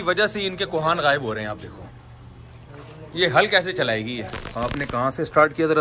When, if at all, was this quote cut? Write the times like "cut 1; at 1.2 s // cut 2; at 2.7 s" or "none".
cut 1; at 4.4 s